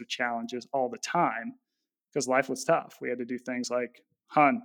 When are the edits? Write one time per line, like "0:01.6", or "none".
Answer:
none